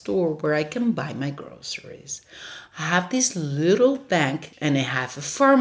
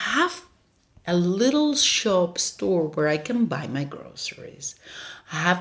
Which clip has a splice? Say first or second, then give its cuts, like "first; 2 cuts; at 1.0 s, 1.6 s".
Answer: first; 1 cut; at 4.5 s